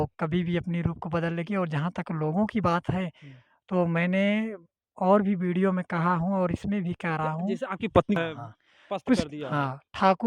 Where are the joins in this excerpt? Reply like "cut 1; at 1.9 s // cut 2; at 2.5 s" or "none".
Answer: cut 1; at 8.2 s